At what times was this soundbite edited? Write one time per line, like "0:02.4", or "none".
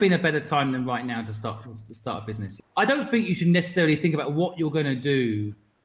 0:02.6